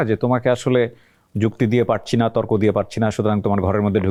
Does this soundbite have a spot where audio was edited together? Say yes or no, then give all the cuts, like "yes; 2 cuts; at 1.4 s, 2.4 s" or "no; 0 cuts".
no; 0 cuts